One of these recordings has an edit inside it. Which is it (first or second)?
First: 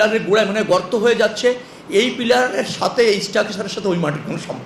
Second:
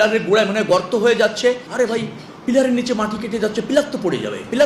second